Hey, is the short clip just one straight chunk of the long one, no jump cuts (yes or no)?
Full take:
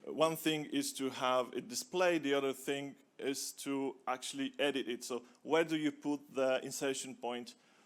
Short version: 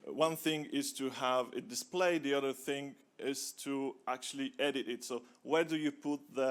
yes